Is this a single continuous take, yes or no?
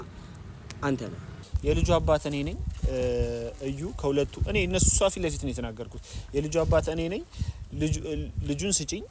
no